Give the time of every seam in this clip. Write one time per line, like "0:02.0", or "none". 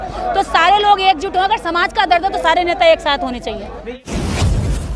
0:04.0

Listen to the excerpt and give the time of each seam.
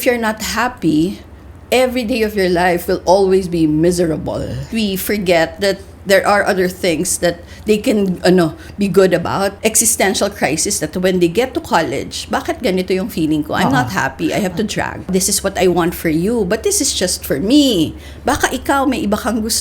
0:04.7
0:09.5
0:15.1

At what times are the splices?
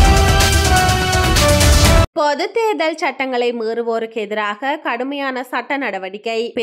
0:01.9

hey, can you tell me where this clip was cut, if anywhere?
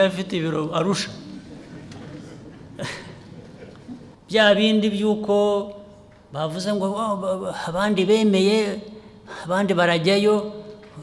0:04.1

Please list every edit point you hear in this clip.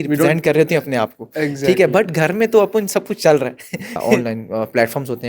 0:04.1

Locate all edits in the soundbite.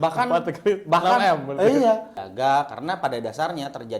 0:02.1

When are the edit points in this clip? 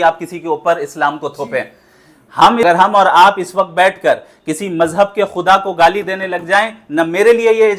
0:02.6

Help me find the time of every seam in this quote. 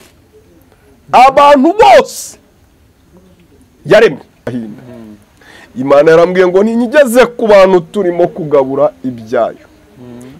0:04.5

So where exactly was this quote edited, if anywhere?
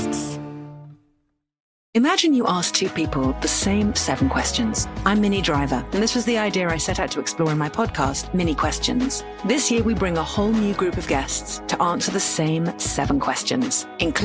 0:01.7

